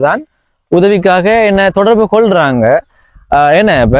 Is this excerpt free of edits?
yes; 0 cuts

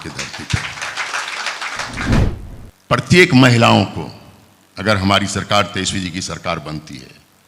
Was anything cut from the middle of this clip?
yes; 1 cut; at 2.2 s

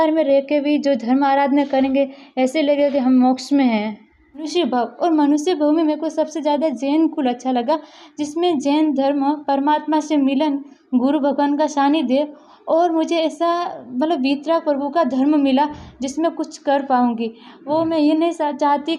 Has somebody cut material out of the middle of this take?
yes; 1 cut; at 4.5 s

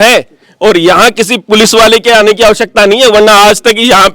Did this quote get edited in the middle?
no; 0 cuts

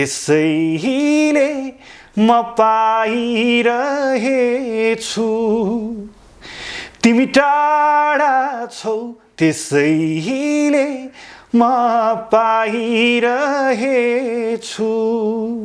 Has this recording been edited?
no; 0 cuts

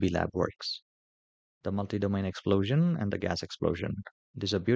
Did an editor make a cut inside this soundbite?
no; 0 cuts

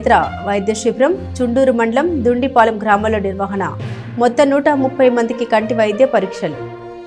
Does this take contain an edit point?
no; 0 cuts

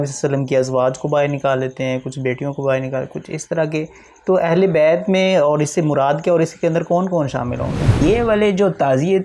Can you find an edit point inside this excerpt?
yes; 1 cut; at 8.0 s

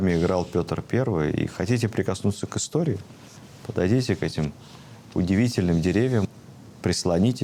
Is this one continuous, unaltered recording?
no; 1 cut; at 6.2 s

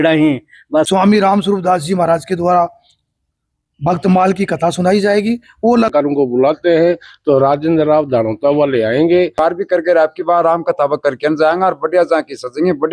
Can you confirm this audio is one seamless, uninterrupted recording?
no; 3 cuts; at 0.9 s, 5.9 s, 9.4 s

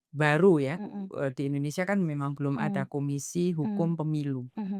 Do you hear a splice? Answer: no; 0 cuts

